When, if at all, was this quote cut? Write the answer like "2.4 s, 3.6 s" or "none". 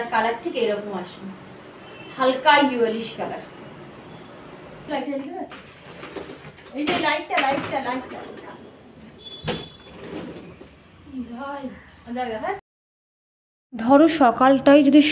none